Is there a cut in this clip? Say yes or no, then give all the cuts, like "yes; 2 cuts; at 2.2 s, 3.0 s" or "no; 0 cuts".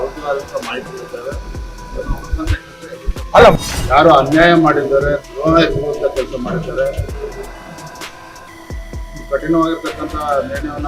yes; 1 cut; at 3.6 s